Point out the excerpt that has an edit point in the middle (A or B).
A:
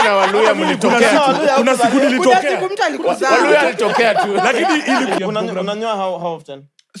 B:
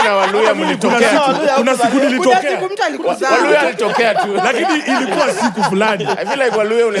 A